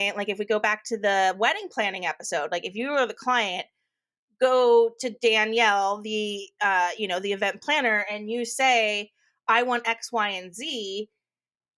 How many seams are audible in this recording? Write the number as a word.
zero